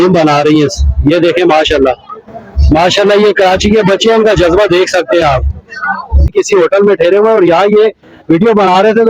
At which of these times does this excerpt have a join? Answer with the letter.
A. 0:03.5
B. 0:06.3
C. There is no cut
B